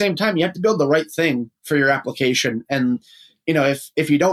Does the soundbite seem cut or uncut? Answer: uncut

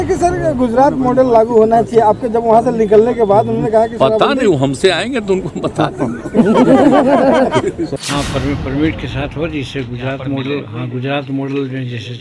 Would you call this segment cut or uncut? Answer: cut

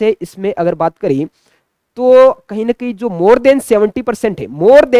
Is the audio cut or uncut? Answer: uncut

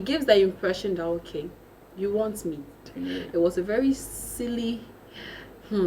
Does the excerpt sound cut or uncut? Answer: cut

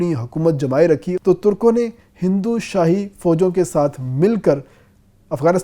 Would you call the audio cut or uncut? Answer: cut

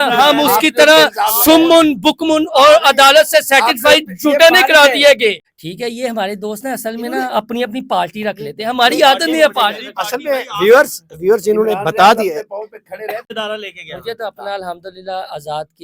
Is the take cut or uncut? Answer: cut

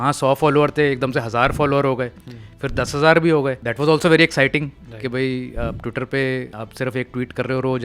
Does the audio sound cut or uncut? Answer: cut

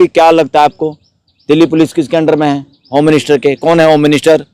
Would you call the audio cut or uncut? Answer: uncut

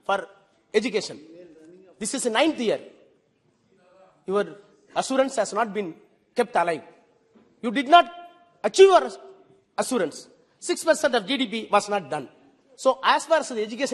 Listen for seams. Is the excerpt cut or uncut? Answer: uncut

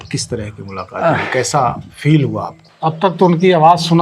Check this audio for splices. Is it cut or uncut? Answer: cut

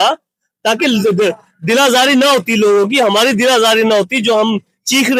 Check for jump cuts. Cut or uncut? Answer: uncut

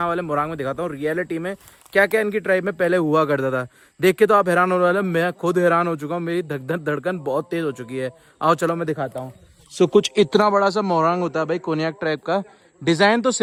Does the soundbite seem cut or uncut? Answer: uncut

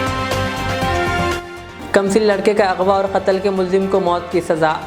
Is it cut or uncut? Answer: cut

